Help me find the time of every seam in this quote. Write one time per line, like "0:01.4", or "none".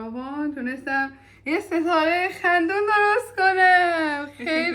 none